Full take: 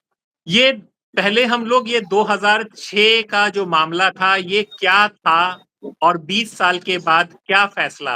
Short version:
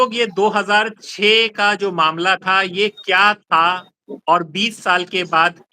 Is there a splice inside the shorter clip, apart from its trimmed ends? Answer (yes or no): no